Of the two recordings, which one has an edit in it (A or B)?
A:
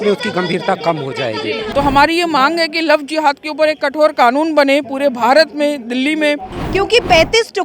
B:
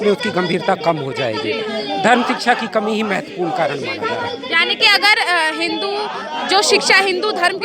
A